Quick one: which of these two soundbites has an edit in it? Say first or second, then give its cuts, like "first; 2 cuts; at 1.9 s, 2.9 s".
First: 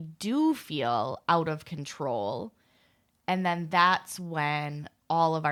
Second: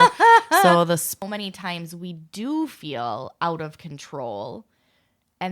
second; 1 cut; at 1.2 s